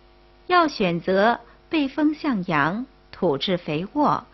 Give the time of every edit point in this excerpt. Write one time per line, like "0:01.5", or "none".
none

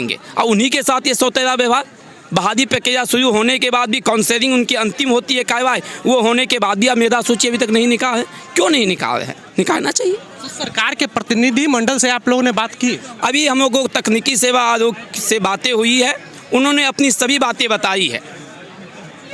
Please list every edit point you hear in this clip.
none

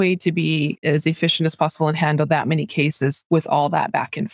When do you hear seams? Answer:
0:00.8
0:03.2

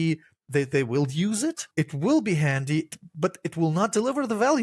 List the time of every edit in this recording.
none

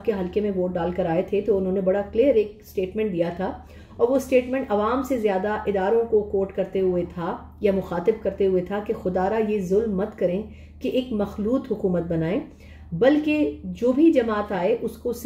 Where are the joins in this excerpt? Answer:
none

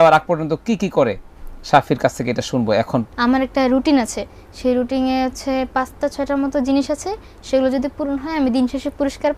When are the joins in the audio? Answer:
0:03.1

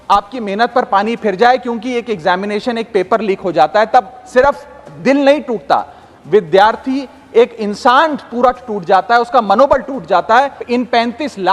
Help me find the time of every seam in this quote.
0:10.6

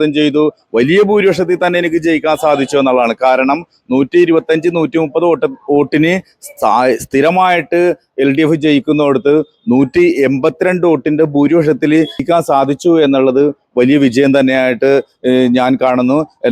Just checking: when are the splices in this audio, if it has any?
0:12.2

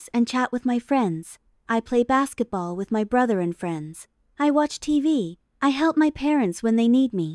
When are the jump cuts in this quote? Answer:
0:03.2

